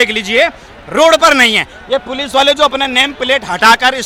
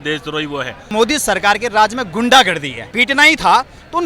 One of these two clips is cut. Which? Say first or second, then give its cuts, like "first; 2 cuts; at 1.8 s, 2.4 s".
second; 2 cuts; at 0.9 s, 2.9 s